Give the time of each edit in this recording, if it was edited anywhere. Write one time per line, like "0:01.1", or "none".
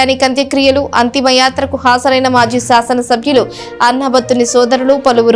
none